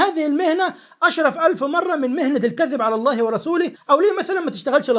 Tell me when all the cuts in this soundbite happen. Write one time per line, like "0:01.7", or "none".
0:03.8